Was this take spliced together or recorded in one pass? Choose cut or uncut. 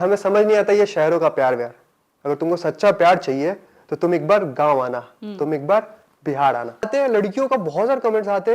cut